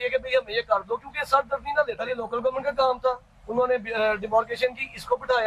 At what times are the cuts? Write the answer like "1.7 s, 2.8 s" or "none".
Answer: 2.2 s